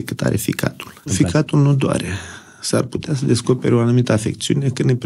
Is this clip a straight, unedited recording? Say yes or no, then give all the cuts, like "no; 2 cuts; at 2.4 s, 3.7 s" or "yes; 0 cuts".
no; 1 cut; at 1.1 s